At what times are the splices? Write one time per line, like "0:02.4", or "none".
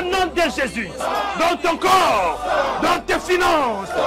0:00.9

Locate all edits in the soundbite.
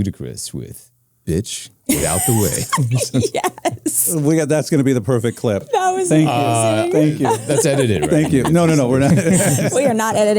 none

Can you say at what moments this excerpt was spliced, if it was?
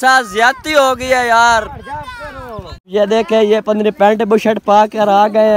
0:02.9

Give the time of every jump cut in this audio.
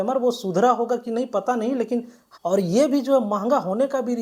0:02.2

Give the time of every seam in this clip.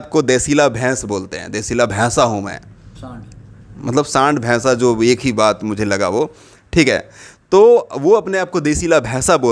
none

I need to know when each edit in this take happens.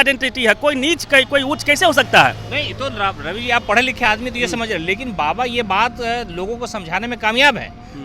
none

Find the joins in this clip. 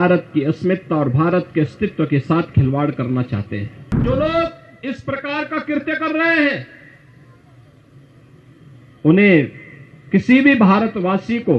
0:04.0

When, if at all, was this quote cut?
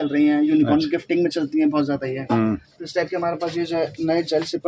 none

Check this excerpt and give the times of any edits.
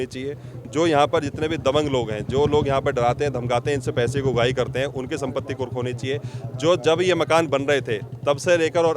none

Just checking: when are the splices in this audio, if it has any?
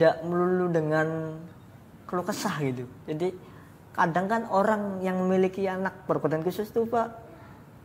none

